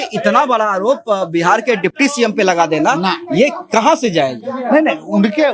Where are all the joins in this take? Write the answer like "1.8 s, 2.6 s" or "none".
none